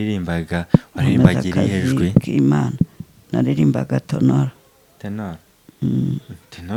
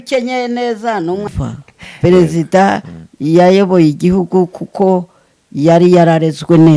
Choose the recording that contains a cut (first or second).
second